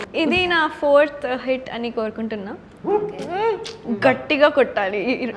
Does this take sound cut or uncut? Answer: uncut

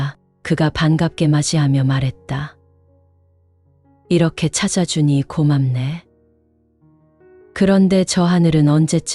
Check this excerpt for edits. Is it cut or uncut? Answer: cut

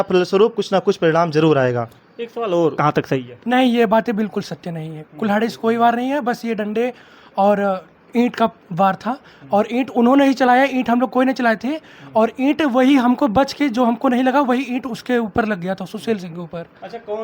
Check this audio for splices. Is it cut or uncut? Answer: cut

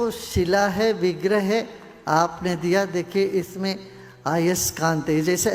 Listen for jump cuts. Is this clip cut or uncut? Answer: uncut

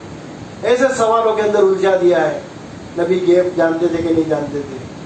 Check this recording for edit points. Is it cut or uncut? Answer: uncut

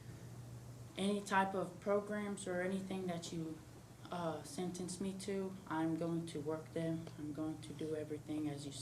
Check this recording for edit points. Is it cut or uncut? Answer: uncut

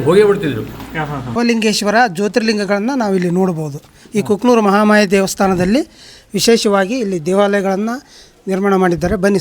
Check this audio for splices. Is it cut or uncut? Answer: cut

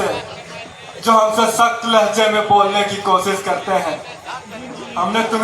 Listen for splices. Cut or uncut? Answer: uncut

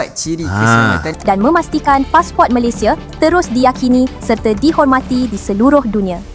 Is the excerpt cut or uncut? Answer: cut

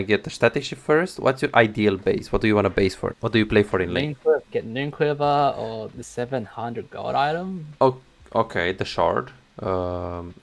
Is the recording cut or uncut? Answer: cut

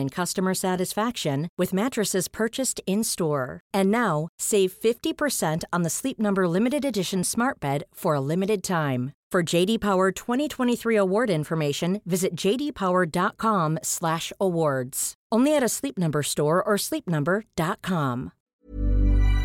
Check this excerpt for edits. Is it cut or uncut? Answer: cut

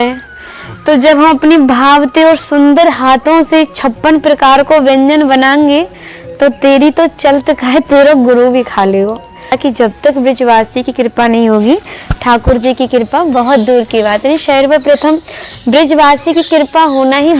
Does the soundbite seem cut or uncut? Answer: cut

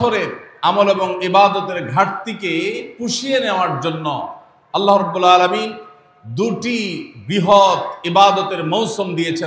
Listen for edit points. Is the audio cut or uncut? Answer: uncut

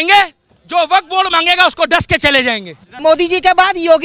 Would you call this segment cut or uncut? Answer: cut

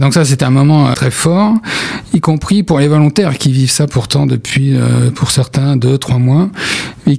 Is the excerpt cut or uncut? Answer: cut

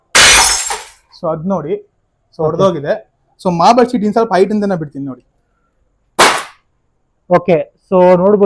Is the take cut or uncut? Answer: uncut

